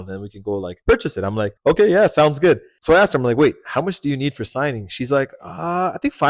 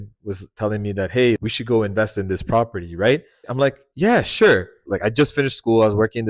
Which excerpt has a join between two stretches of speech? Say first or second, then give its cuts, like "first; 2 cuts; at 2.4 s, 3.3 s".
second; 3 cuts; at 1.4 s, 3.4 s, 4.8 s